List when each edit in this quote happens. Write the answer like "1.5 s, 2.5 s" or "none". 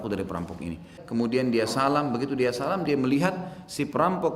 1.0 s